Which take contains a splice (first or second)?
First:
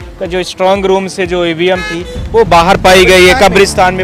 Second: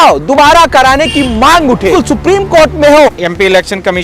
second